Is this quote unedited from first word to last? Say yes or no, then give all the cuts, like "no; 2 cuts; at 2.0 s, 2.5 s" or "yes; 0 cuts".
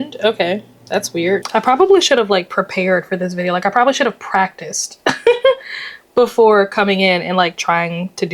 no; 1 cut; at 1.4 s